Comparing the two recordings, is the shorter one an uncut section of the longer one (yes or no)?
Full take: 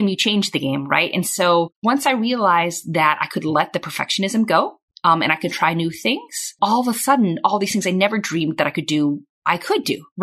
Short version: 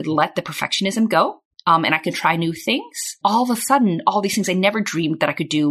yes